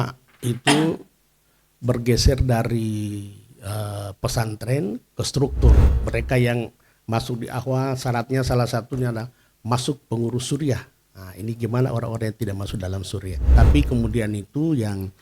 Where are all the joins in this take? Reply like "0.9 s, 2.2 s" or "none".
5.9 s, 13.5 s